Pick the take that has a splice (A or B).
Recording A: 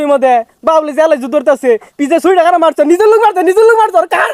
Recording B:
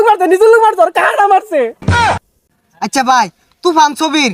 B